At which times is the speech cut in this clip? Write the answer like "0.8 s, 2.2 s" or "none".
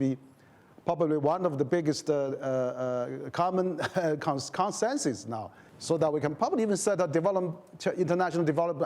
none